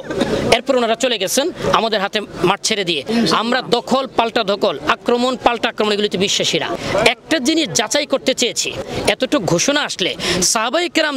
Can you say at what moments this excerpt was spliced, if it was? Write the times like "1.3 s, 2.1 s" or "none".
3.0 s, 6.7 s, 8.8 s